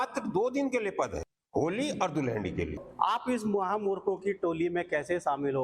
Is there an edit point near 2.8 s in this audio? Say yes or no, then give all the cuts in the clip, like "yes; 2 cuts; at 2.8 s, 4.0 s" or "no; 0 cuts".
yes; 2 cuts; at 1.3 s, 2.8 s